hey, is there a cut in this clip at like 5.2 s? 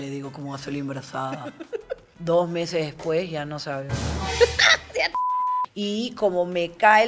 yes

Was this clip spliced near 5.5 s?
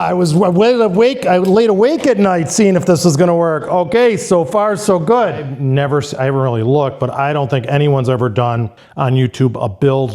yes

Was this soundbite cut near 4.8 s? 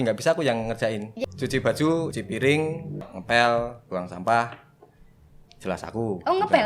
no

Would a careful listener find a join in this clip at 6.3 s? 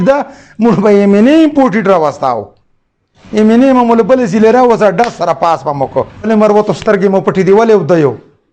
yes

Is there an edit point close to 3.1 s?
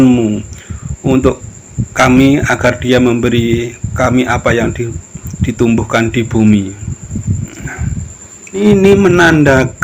no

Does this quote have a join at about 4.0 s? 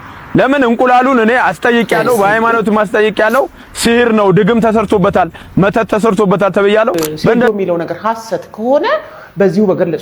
no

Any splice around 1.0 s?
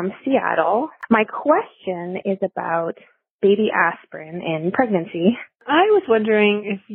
yes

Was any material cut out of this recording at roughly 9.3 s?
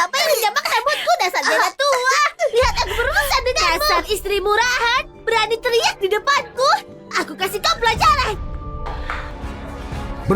yes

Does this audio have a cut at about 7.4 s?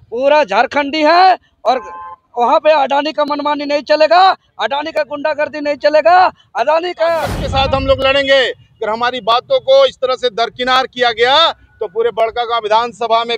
yes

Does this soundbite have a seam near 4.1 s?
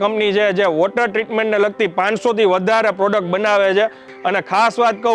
yes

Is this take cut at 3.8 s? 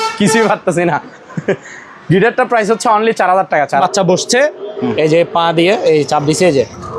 yes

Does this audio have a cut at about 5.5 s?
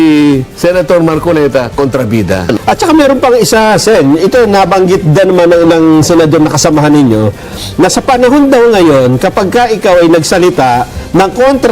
no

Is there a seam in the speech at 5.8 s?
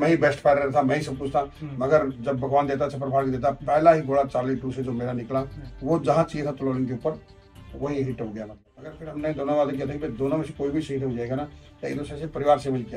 no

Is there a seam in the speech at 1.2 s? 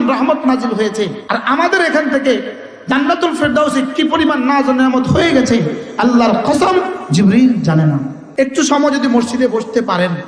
yes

